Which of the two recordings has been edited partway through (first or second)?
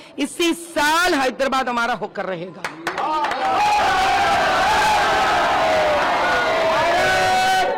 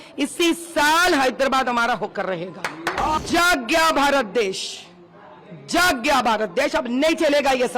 second